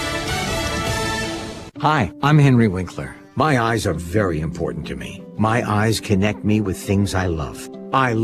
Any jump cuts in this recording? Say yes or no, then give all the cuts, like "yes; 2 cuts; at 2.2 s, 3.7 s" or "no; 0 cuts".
yes; 1 cut; at 1.6 s